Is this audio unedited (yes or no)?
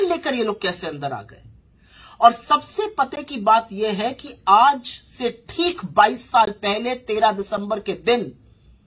yes